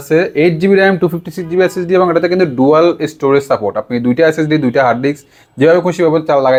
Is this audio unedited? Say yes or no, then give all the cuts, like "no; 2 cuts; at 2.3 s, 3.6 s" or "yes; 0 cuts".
yes; 0 cuts